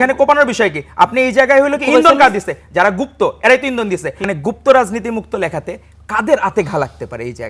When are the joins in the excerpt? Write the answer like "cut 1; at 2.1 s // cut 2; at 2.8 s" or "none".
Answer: cut 1; at 4.3 s